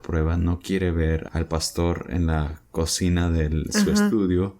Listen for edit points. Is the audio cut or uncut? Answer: cut